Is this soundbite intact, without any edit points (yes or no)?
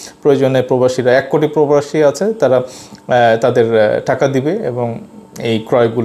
yes